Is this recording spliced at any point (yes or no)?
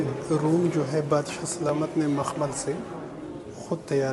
no